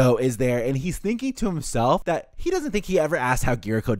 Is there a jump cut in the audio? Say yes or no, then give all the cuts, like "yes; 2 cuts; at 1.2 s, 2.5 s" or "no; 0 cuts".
yes; 1 cut; at 2.0 s